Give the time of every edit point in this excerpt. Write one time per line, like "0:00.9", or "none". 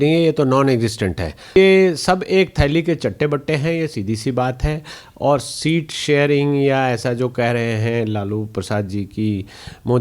0:01.6